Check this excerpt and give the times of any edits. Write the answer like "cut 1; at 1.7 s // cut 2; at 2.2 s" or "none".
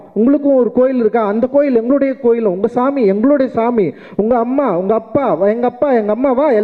none